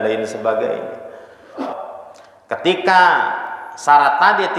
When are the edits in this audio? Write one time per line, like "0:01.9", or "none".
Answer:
0:01.6